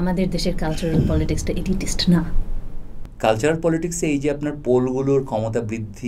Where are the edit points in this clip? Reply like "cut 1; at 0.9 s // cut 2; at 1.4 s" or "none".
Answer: cut 1; at 2.9 s